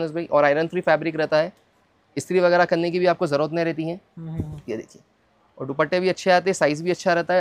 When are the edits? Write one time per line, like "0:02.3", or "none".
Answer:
none